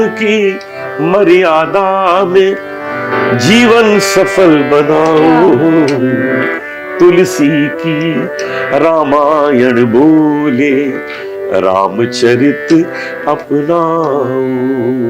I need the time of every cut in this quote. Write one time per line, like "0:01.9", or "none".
none